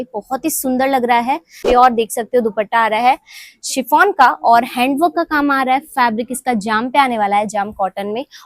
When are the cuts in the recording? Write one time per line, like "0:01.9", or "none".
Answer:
0:01.6

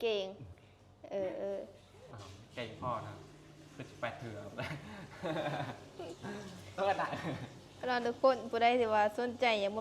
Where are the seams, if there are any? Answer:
0:02.1

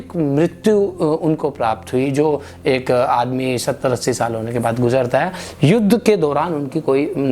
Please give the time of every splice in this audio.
none

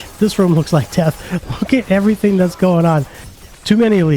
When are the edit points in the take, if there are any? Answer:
0:03.2

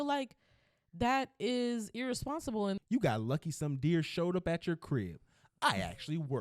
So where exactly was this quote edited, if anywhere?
0:02.8

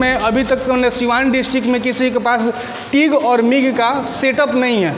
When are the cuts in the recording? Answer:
none

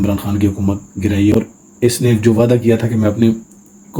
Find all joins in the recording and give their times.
0:01.3

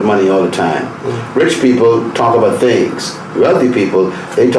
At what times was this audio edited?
none

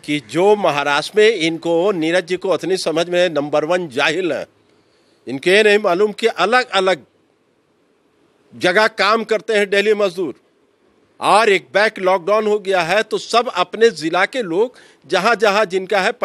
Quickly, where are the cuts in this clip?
none

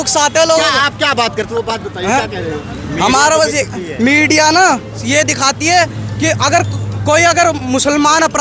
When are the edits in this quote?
none

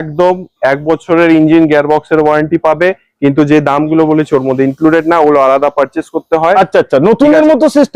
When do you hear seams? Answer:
none

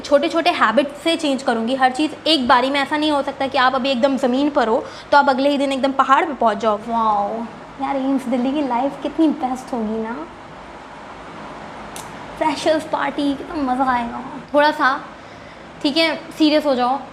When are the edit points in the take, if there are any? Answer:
0:06.6
0:14.3

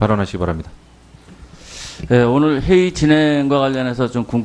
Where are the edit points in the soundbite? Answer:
none

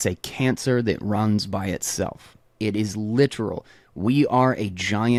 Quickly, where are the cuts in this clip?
none

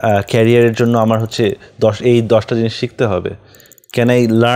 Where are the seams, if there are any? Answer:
none

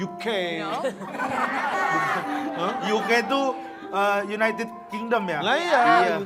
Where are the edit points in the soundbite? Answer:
none

